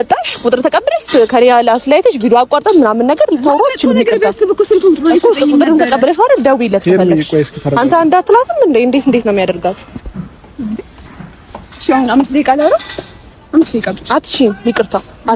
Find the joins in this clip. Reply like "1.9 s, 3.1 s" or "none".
none